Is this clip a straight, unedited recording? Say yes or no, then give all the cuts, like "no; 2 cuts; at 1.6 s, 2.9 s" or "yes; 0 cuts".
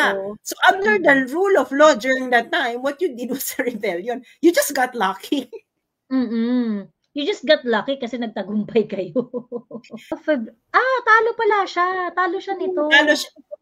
no; 1 cut; at 10.2 s